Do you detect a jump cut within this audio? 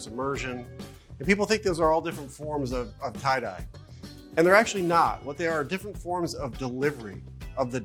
no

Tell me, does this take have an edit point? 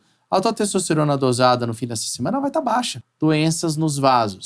yes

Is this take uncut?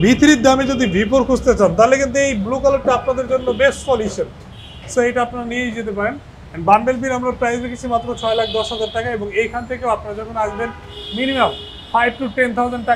yes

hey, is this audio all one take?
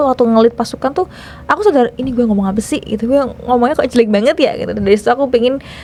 yes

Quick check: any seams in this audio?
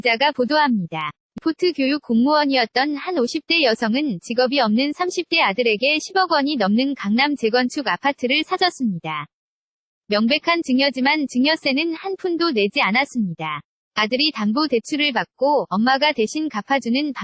yes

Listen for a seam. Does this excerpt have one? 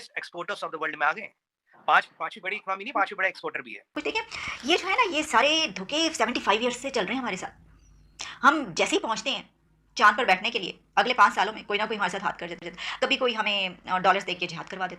yes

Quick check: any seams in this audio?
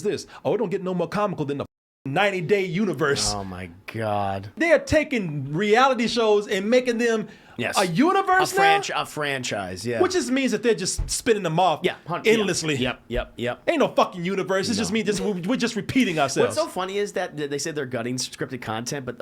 yes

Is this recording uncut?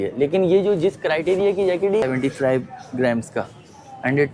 no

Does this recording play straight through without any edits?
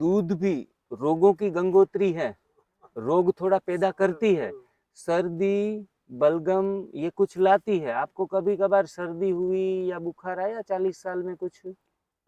yes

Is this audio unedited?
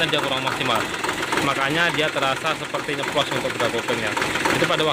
yes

